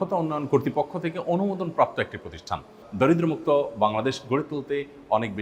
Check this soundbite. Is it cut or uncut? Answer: cut